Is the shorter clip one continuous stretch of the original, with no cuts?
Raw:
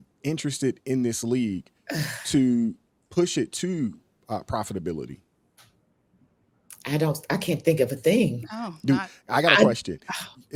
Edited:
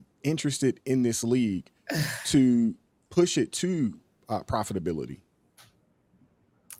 yes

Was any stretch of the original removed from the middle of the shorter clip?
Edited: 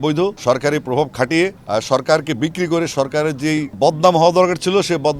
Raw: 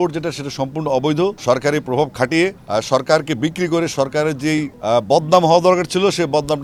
yes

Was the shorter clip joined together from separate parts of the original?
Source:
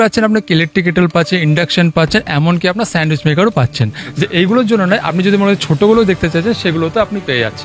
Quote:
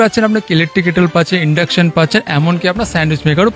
no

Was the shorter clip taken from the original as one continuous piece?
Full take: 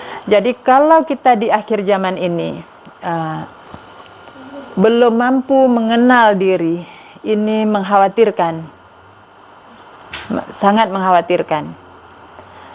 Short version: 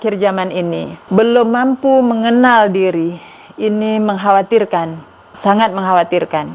no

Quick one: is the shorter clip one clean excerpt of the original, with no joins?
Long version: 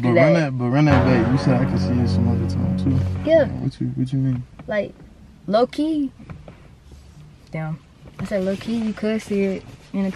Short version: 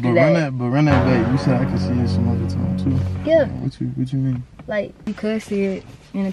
no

